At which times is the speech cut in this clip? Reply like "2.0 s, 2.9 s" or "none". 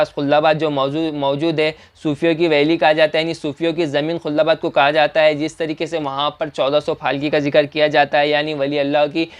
none